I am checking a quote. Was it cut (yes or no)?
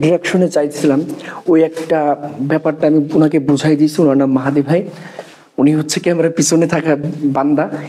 no